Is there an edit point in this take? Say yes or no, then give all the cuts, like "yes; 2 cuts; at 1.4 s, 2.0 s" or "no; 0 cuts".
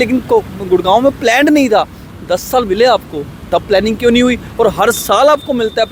no; 0 cuts